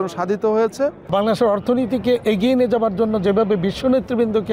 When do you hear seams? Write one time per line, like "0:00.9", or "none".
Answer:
0:01.0

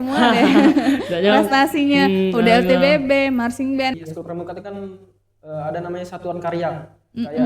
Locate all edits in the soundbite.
0:03.9

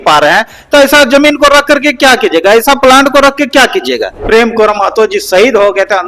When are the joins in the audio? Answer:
0:04.1

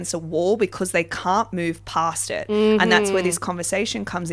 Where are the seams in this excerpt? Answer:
none

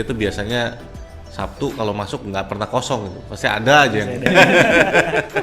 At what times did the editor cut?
0:04.3

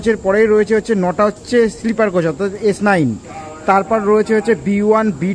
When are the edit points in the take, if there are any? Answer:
none

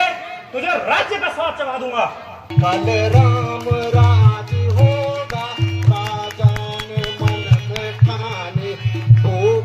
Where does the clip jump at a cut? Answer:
0:02.5

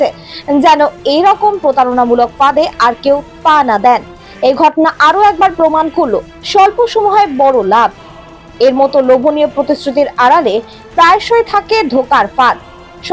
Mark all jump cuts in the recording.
none

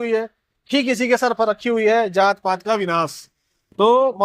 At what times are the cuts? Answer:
none

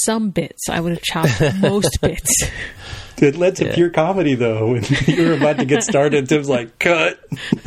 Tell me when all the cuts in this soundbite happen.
none

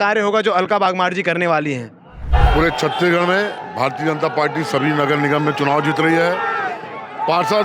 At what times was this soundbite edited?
0:02.3

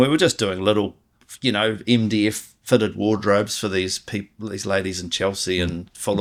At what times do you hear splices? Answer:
none

